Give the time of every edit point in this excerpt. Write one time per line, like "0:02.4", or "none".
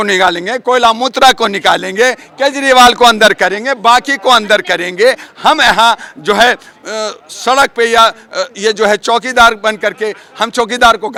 none